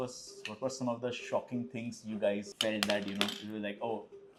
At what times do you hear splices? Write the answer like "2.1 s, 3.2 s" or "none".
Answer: none